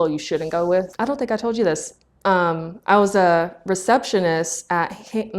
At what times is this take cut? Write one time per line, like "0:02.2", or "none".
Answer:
0:00.9